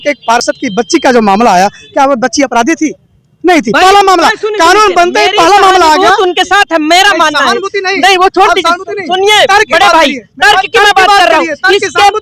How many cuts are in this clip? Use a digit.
0